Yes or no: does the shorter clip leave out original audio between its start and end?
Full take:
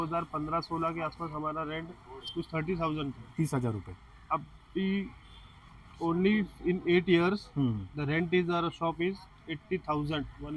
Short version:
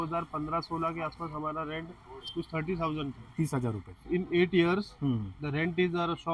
yes